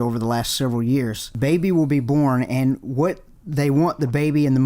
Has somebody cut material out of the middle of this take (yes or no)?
yes